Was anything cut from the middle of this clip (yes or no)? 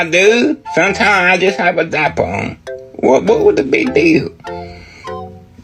no